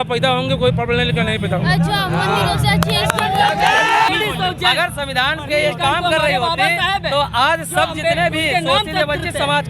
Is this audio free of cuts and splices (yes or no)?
yes